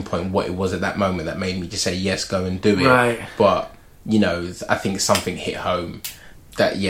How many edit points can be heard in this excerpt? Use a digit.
0